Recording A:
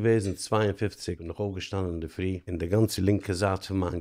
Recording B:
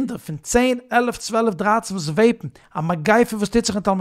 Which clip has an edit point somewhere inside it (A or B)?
A